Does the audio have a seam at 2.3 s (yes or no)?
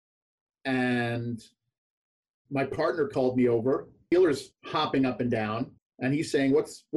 no